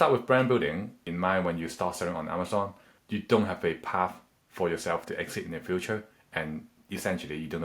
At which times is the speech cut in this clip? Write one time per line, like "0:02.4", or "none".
0:01.0
0:02.9
0:06.7